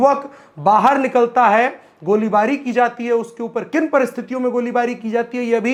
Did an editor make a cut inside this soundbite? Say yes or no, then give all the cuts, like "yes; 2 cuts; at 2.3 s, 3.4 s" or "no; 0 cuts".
no; 0 cuts